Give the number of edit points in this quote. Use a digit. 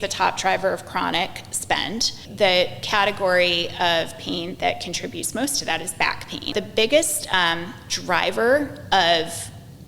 2